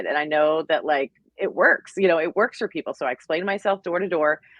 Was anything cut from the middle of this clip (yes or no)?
yes